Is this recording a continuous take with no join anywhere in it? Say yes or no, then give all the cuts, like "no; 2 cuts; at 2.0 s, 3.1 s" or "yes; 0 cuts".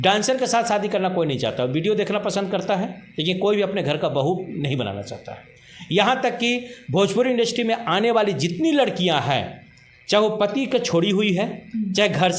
yes; 0 cuts